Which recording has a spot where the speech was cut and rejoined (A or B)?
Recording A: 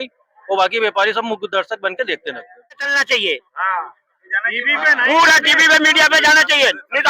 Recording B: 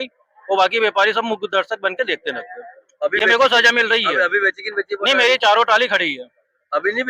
A